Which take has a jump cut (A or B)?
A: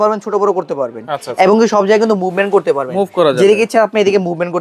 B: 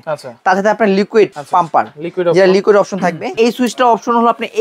B